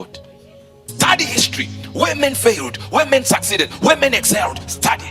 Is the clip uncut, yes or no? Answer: no